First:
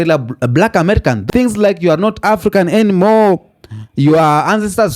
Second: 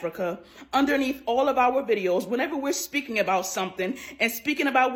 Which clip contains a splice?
first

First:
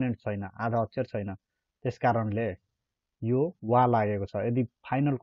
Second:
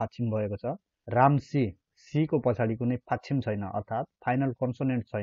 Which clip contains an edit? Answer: second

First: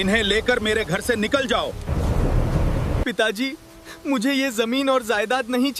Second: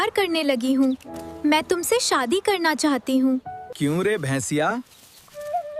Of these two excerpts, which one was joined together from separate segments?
second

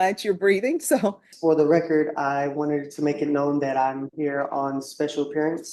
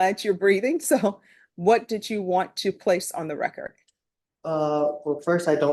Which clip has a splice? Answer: first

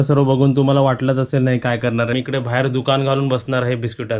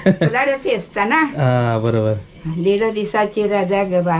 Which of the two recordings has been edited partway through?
first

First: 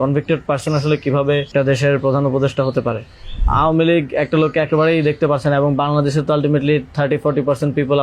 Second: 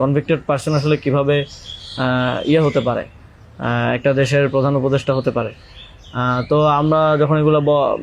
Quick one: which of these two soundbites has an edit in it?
first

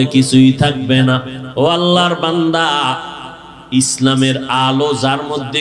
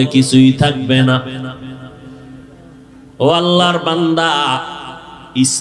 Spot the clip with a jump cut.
first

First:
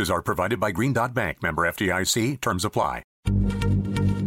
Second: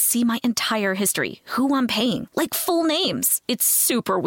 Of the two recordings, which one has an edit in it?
first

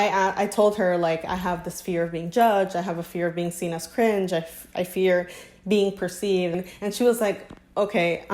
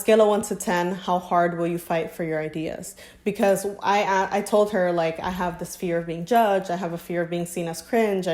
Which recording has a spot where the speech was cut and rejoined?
first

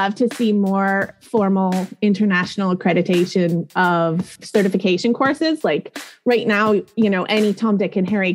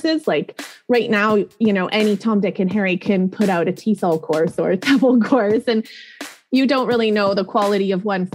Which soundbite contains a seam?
first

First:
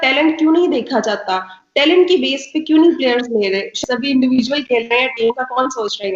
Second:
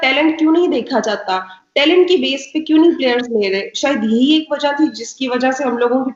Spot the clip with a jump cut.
first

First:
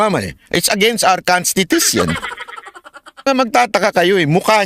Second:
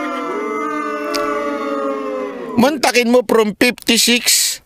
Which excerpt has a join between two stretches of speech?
first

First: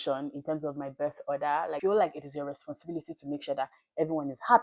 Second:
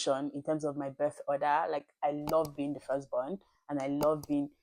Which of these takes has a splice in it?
first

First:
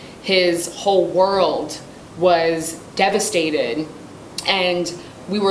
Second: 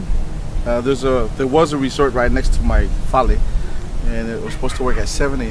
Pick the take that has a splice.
second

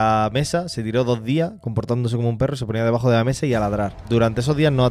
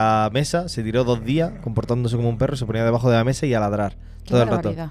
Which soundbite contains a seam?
first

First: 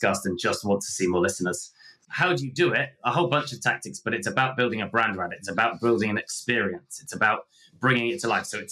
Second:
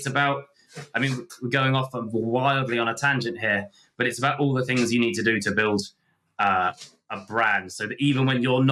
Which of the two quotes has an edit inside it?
first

